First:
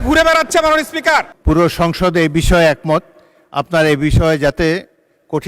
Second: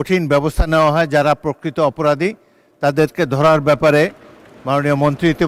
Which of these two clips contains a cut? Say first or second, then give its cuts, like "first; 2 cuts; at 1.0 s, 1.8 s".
first; 1 cut; at 1.3 s